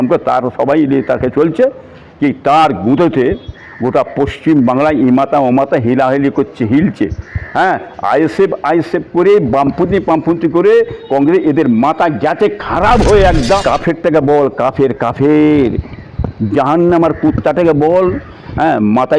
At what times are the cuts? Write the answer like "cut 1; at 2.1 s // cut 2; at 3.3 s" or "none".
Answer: cut 1; at 13.6 s